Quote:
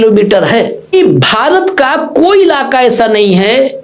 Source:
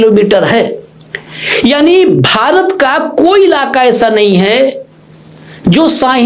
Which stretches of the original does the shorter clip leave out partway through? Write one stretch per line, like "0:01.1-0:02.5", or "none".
0:00.9-0:02.0